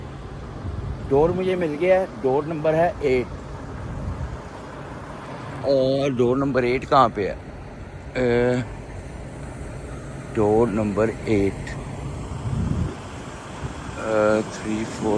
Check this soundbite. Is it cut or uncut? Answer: uncut